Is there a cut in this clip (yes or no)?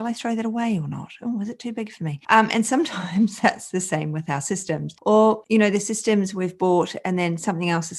no